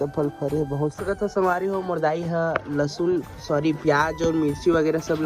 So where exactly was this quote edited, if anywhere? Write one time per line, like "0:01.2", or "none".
0:01.0